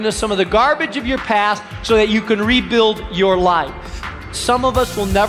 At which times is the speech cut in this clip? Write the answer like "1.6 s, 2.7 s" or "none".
4.4 s